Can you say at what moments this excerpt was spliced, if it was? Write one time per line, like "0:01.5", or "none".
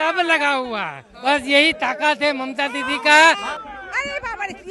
0:01.0
0:03.5